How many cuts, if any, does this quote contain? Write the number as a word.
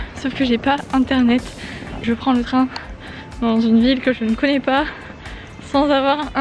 one